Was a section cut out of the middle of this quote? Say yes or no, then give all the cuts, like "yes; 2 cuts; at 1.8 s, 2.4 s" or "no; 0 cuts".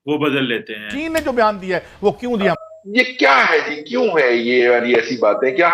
yes; 2 cuts; at 0.9 s, 2.5 s